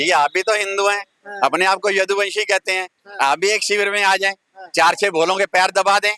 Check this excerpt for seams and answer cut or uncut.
uncut